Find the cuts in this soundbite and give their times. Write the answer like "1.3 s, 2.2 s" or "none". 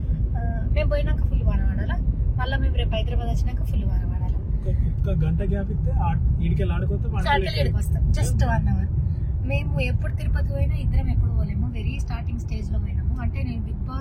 none